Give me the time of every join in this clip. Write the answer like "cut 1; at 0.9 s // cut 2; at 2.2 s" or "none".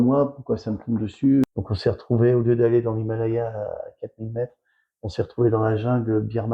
cut 1; at 1.5 s

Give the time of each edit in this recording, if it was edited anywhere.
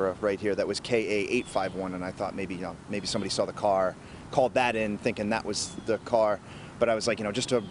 cut 1; at 6.6 s

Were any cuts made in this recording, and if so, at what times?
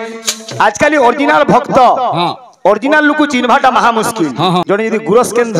cut 1; at 4.6 s

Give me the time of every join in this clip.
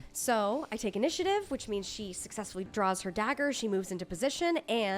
cut 1; at 2.7 s

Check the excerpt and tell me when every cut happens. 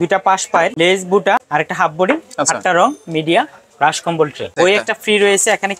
cut 1; at 0.7 s // cut 2; at 1.5 s // cut 3; at 4.5 s

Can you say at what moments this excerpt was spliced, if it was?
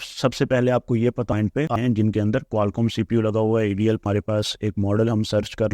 cut 1; at 1.6 s // cut 2; at 4.0 s

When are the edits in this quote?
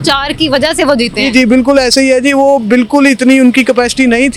none

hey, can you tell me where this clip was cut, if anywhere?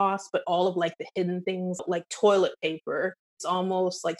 cut 1; at 1.8 s // cut 2; at 3.3 s

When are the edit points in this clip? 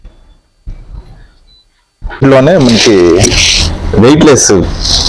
cut 1; at 2.2 s

